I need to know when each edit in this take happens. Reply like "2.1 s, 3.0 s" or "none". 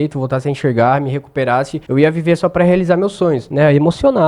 1.8 s, 3.5 s